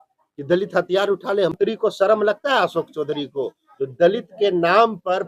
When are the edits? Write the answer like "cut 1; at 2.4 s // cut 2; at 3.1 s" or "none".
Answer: cut 1; at 1.5 s